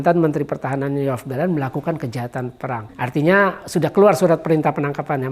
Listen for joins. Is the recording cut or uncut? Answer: cut